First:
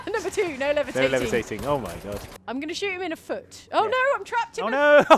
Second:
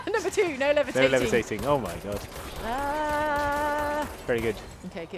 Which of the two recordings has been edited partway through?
first; 1 cut; at 2.4 s

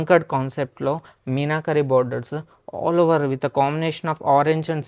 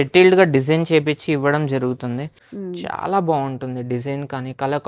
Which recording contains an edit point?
second; 1 cut; at 2.3 s

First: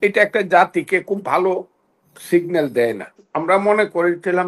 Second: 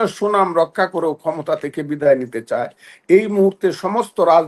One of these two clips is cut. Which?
first; 1 cut; at 3.2 s

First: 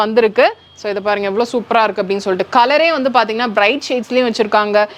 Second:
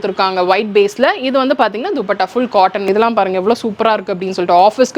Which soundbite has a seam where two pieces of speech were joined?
second; 1 cut; at 2.9 s

